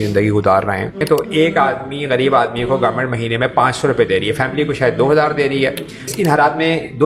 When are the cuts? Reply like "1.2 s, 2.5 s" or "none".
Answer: 1.0 s, 6.1 s